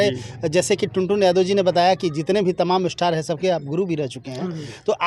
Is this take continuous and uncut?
yes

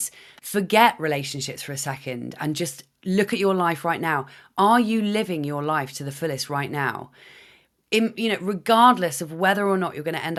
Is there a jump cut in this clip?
no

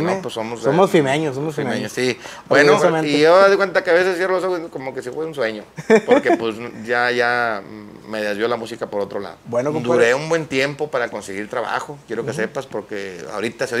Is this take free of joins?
no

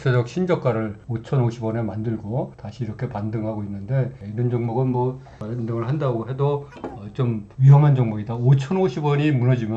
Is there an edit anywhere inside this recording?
yes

